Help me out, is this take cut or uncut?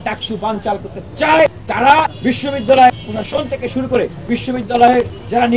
uncut